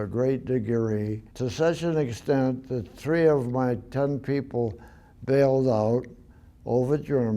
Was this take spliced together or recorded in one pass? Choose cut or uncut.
cut